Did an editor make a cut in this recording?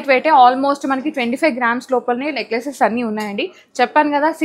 no; 0 cuts

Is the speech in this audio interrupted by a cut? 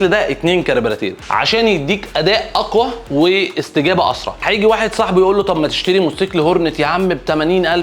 yes; 2 cuts; at 1.2 s, 4.4 s

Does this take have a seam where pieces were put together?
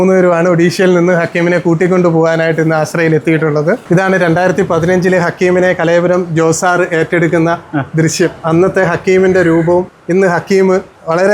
yes; 1 cut; at 10.0 s

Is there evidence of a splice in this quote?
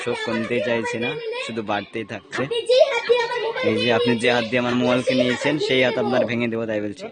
no; 0 cuts

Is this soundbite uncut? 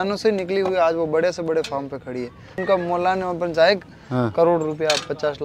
no; 1 cut; at 2.6 s

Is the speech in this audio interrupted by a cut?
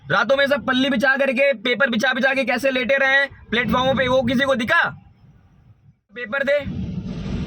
yes; 1 cut; at 6.3 s

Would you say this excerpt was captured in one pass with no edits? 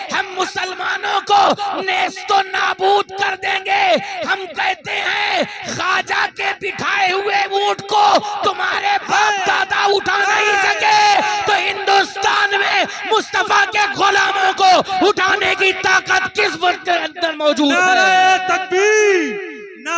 yes; 0 cuts

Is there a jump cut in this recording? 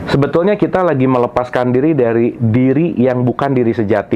no; 0 cuts

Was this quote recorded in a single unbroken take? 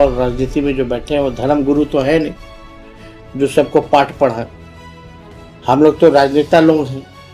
yes; 0 cuts

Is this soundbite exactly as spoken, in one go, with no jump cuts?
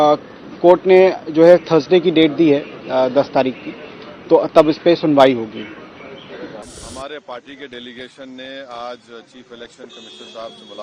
no; 1 cut; at 6.7 s

